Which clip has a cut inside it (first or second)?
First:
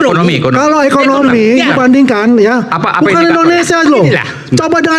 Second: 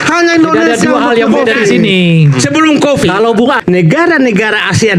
second